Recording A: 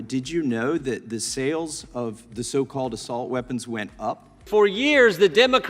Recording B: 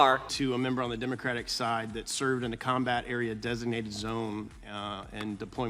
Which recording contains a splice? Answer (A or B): A